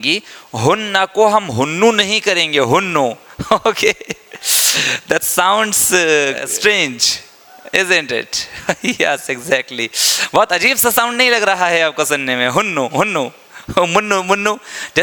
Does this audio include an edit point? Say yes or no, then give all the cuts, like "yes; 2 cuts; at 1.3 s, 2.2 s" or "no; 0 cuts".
no; 0 cuts